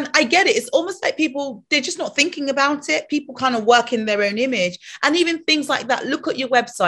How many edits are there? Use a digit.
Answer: 0